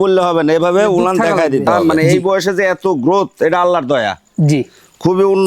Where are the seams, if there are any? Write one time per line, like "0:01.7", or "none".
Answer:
0:01.8